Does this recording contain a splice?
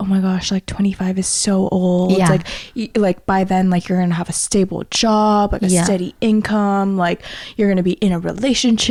no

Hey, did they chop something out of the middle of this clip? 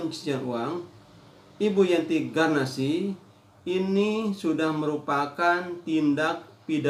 no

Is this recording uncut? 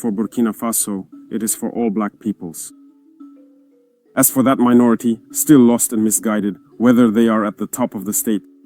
no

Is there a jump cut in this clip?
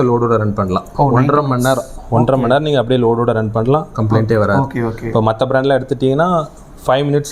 no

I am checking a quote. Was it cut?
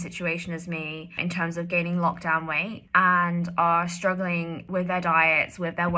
yes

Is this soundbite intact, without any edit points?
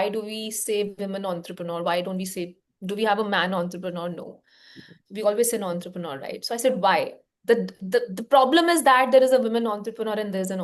yes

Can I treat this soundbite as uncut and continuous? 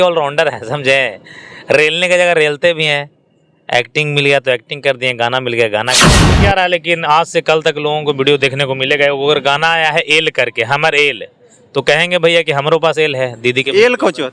no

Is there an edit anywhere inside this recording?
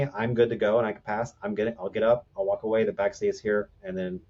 no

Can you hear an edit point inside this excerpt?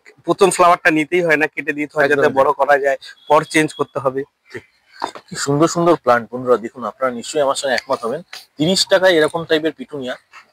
no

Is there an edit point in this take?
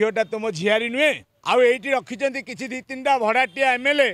yes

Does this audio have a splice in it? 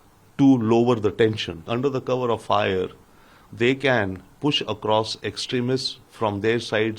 yes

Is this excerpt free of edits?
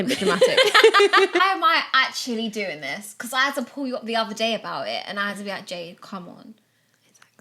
no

